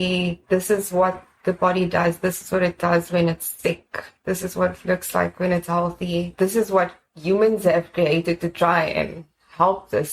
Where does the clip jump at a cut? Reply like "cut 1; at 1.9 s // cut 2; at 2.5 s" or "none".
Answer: none